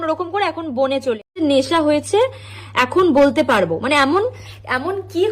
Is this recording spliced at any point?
yes; 1 cut; at 1.2 s

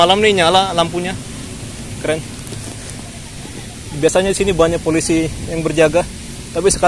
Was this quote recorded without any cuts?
yes; 0 cuts

